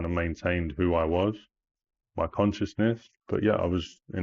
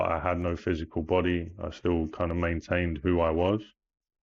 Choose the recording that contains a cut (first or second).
first